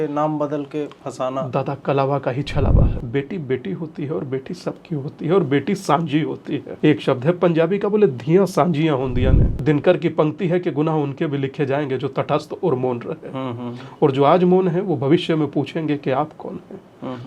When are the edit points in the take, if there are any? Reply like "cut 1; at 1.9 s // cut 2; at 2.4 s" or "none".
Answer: cut 1; at 2.9 s // cut 2; at 6.7 s // cut 3; at 9.5 s